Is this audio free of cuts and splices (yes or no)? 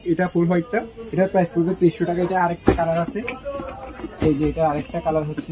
yes